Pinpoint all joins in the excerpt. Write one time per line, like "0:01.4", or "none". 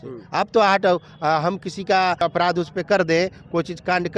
0:02.2

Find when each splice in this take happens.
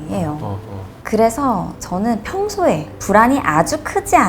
0:00.9
0:01.8

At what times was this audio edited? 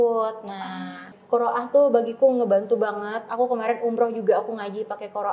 0:01.1

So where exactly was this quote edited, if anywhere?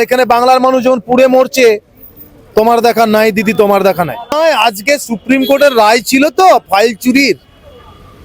0:04.3

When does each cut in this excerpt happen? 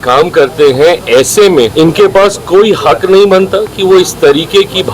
0:01.7

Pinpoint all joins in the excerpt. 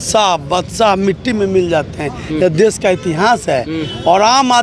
none

